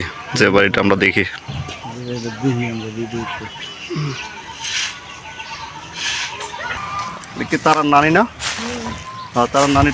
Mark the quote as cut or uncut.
uncut